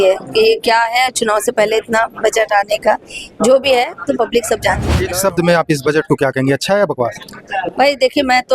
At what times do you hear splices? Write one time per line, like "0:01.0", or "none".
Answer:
0:05.0